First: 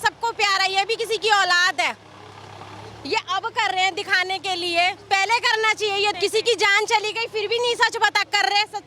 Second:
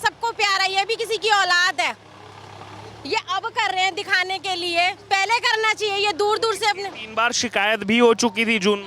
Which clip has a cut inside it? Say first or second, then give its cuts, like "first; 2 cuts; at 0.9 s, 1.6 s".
first; 1 cut; at 6.1 s